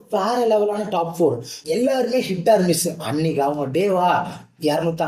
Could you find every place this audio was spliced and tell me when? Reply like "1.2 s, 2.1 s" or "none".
1.5 s